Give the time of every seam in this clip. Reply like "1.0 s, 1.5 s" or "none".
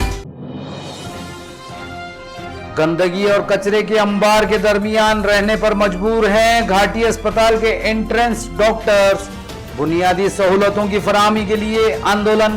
1.7 s

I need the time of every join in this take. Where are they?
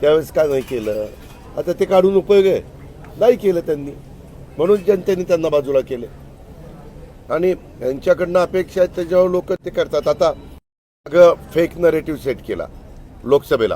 none

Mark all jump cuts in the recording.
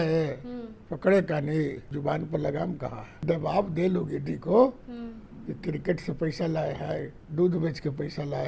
1.9 s, 3.2 s

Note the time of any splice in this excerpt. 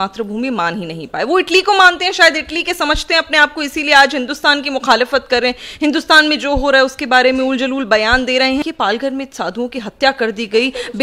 8.6 s

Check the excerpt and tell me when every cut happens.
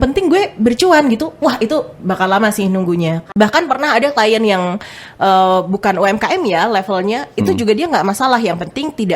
3.3 s

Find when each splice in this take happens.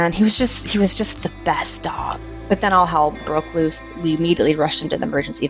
2.3 s, 3.8 s

